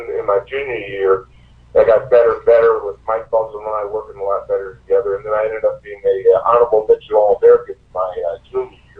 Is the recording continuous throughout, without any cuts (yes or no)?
yes